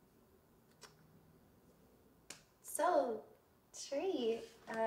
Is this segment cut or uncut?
uncut